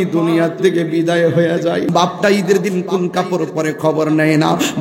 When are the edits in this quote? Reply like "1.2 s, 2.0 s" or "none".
1.9 s